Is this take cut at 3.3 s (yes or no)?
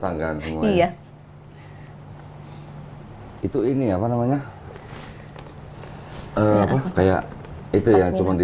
yes